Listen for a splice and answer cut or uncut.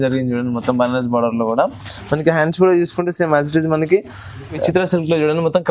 cut